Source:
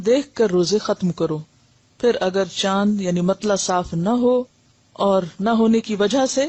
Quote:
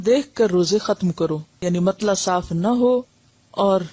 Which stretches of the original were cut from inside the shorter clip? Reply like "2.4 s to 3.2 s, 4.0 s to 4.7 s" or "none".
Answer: 1.6 s to 3.0 s